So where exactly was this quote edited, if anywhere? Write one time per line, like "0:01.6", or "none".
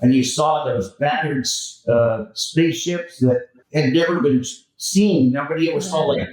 0:03.6